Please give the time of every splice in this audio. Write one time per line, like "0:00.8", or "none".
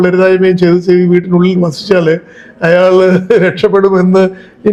none